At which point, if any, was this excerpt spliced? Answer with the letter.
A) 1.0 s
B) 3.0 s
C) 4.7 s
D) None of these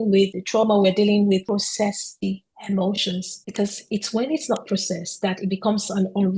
D